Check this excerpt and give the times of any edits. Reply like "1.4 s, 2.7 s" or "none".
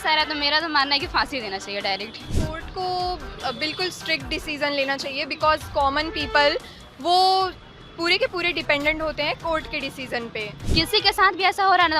2.3 s, 10.7 s